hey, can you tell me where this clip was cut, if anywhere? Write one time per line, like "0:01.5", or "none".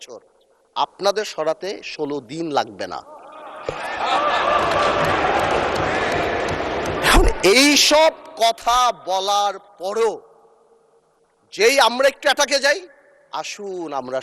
none